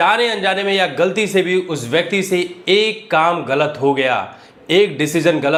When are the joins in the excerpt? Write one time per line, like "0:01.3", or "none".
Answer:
none